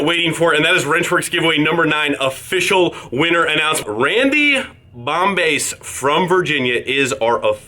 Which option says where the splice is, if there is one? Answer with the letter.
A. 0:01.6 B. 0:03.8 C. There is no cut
B